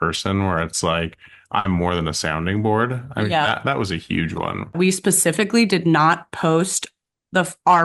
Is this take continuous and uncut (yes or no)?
no